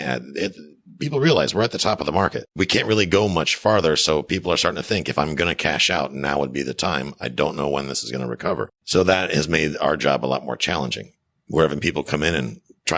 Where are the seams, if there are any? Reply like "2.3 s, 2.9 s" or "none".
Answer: 2.4 s, 8.8 s